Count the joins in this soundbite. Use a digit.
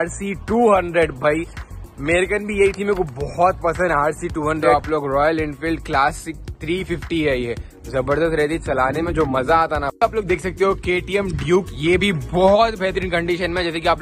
2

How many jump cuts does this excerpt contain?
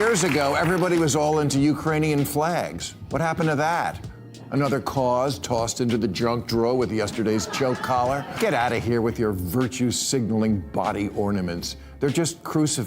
1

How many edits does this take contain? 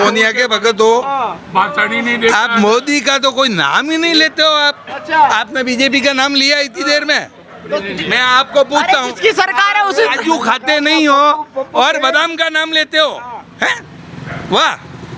0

